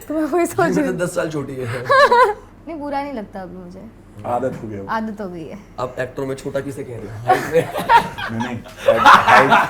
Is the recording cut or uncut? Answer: cut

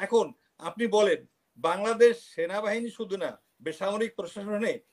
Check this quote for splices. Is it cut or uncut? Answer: uncut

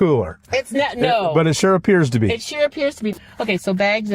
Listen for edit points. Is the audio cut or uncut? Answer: cut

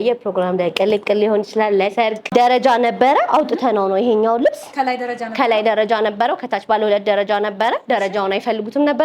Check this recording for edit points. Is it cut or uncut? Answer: cut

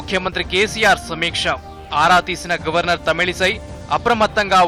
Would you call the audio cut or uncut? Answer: uncut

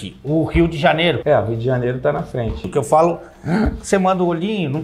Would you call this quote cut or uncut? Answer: cut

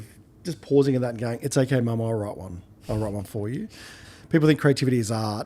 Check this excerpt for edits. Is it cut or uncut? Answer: cut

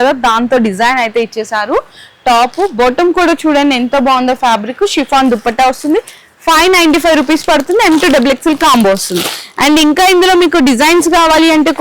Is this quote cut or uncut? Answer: uncut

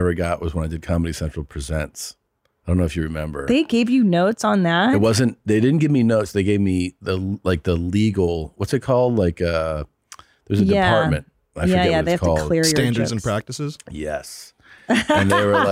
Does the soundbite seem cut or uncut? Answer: uncut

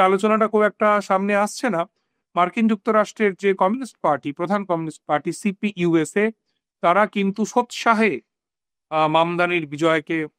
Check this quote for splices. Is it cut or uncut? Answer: uncut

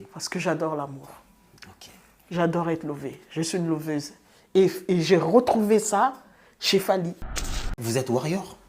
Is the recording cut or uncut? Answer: cut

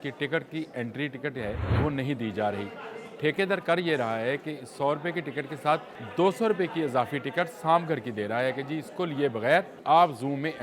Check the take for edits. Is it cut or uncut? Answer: cut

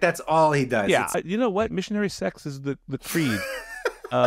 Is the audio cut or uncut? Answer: cut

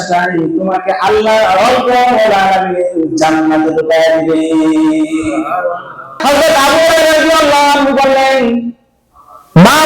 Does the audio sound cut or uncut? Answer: cut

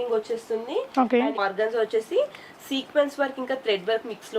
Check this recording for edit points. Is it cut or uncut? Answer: cut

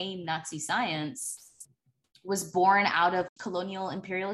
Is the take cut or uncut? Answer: cut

